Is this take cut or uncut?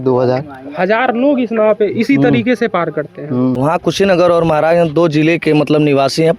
cut